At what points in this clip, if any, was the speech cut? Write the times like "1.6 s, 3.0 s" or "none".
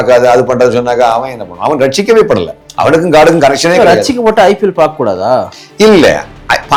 none